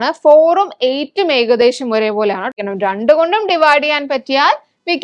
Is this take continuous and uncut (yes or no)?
no